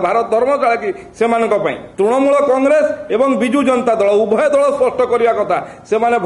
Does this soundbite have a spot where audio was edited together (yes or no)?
yes